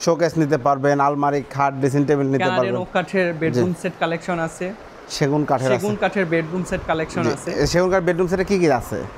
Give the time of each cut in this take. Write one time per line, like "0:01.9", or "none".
none